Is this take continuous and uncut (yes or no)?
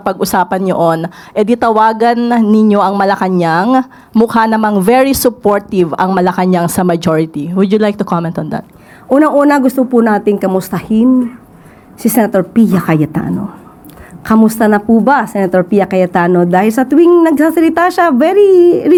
yes